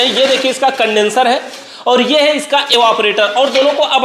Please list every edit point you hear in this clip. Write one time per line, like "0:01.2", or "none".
none